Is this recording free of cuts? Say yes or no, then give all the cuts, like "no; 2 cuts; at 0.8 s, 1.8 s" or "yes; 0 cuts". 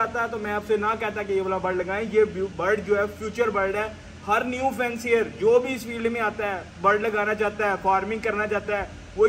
yes; 0 cuts